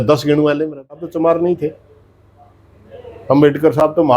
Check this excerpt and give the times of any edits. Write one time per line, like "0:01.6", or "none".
0:01.1